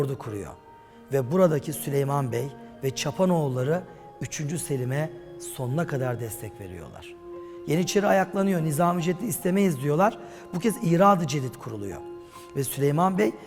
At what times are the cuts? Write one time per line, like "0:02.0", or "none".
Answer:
none